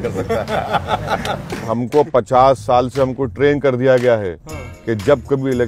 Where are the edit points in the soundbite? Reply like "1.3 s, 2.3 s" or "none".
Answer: 1.6 s